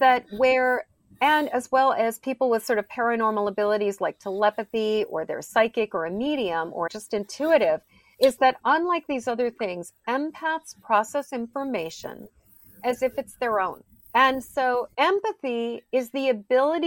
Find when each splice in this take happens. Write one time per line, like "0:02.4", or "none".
0:07.0
0:15.0